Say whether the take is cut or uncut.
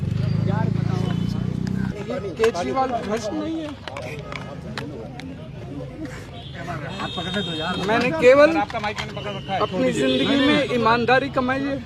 uncut